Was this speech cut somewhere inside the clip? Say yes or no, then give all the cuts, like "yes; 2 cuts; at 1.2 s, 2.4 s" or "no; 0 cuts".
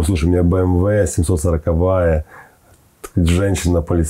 no; 0 cuts